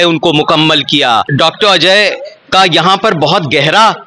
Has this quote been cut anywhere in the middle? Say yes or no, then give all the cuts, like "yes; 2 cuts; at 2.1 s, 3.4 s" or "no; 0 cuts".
yes; 1 cut; at 1.3 s